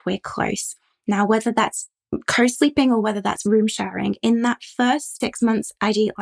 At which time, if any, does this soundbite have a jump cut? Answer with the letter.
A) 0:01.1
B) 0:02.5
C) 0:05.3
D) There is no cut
D